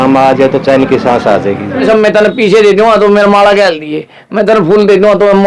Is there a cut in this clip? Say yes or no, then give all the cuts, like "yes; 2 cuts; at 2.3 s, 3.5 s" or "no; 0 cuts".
yes; 1 cut; at 1.8 s